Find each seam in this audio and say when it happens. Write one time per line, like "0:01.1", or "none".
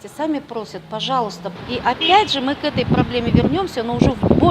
0:01.5